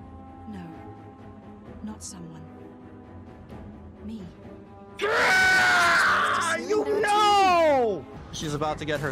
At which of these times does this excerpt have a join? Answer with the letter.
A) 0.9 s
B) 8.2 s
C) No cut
B